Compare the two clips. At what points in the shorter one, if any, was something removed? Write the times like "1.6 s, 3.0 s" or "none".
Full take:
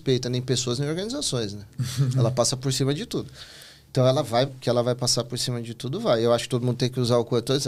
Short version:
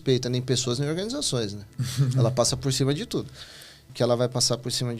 3.9 s